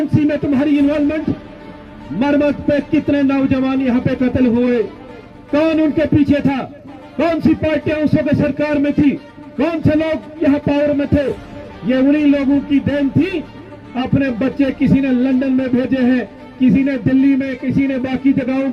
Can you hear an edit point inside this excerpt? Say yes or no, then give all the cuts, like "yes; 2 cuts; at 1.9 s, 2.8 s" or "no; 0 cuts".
no; 0 cuts